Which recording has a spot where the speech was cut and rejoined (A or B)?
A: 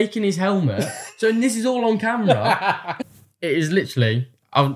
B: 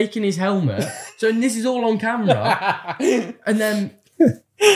A